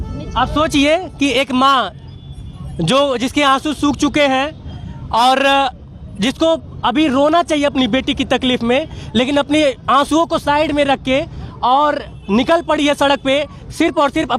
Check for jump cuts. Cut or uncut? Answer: uncut